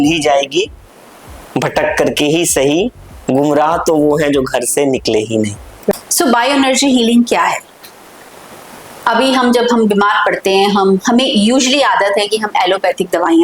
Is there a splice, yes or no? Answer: yes